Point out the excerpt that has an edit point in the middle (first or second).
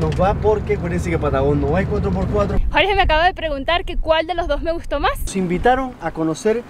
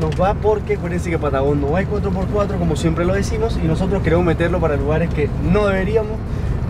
first